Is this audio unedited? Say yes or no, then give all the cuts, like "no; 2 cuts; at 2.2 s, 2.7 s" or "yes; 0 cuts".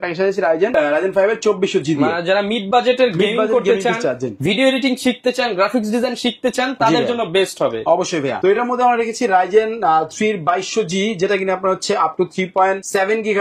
yes; 0 cuts